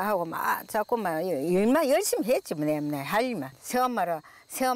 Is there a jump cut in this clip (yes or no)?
yes